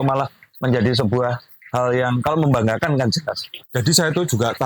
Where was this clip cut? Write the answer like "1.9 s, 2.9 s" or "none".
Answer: 3.5 s